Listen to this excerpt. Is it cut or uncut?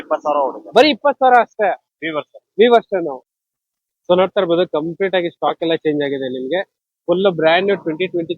cut